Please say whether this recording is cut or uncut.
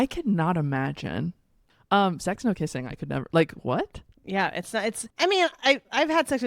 cut